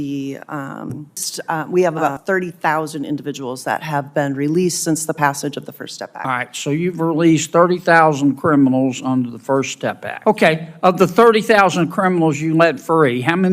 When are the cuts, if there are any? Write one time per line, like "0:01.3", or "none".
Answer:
0:01.3
0:10.1